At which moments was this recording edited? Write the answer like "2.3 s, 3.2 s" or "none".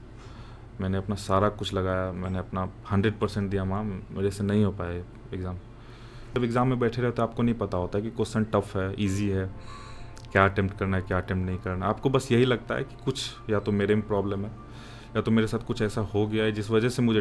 6.4 s